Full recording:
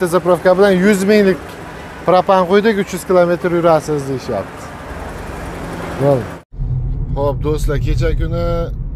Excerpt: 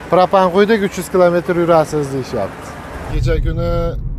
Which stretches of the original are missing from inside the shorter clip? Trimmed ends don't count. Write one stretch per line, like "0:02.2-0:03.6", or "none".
0:05.1-0:07.9